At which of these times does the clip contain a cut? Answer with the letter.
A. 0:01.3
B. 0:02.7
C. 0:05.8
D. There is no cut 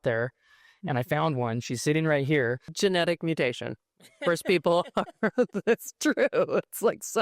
B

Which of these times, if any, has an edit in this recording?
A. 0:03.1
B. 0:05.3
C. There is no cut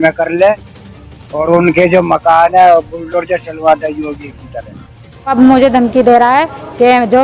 B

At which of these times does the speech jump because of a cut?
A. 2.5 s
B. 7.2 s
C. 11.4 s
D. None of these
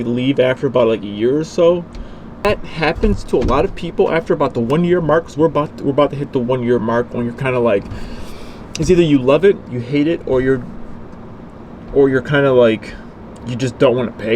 A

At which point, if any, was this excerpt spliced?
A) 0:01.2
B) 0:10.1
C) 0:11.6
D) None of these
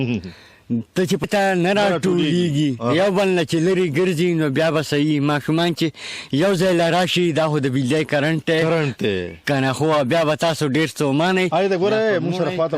A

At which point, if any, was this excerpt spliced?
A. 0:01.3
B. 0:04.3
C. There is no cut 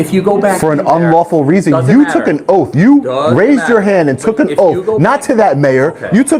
C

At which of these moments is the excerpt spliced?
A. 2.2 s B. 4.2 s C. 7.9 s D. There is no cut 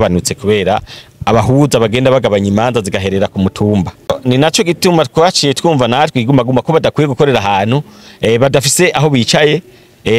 B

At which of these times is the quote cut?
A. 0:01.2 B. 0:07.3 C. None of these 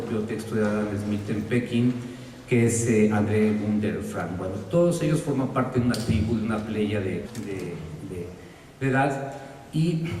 C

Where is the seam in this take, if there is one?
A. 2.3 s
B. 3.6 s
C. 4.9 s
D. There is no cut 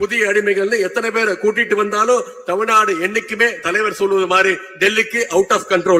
D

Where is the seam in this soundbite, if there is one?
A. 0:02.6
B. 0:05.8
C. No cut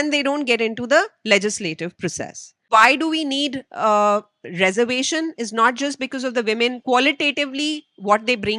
A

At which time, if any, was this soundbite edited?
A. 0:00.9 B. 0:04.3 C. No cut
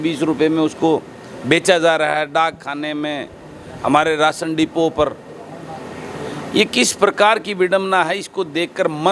C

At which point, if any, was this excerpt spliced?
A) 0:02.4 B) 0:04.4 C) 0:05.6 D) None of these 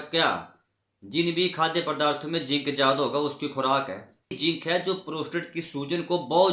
B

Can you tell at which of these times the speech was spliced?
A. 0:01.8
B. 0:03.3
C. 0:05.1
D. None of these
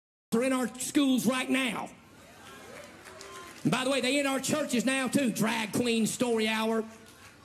D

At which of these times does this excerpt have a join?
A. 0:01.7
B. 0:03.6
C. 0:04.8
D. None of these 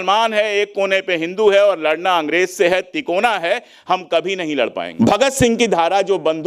C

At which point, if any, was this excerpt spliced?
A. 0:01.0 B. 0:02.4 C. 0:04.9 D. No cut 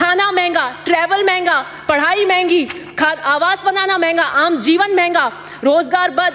D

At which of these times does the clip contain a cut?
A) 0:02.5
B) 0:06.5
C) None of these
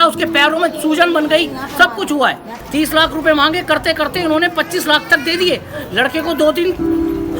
A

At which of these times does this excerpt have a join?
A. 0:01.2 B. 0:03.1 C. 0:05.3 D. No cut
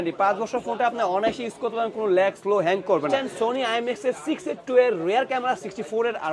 B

